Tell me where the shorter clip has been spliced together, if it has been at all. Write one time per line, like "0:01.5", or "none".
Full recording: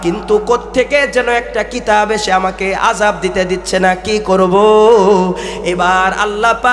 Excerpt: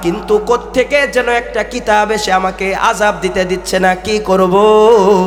none